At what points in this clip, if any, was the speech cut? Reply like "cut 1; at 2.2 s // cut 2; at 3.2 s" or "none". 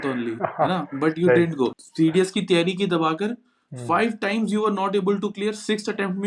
cut 1; at 1.7 s